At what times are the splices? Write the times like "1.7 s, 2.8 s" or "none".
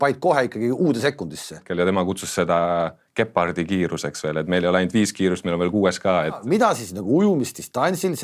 1.6 s, 6.4 s

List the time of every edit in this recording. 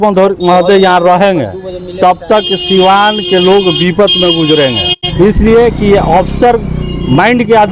5.0 s

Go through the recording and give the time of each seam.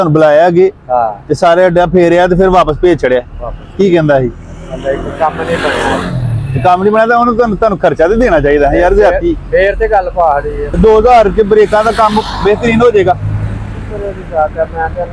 none

